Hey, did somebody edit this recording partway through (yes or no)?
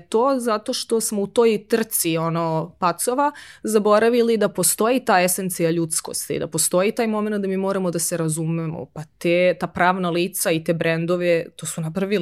no